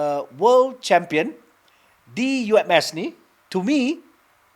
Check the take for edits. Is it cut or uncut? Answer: uncut